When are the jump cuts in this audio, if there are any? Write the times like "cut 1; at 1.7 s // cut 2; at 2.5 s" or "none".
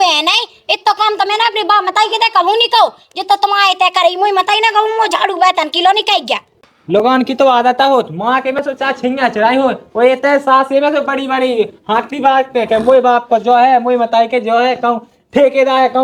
none